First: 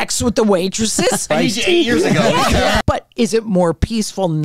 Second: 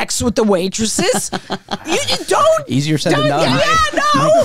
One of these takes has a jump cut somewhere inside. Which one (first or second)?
first